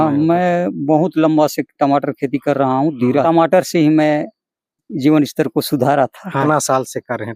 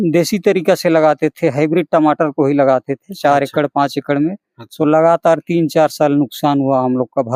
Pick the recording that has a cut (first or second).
first